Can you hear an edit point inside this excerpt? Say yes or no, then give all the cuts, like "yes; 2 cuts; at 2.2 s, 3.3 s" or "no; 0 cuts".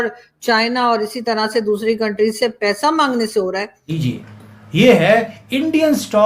yes; 1 cut; at 4.1 s